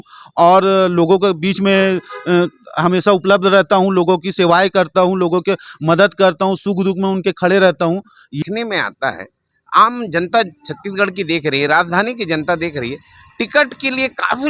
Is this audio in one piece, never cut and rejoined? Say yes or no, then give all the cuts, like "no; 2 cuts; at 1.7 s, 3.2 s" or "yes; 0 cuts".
no; 1 cut; at 8.4 s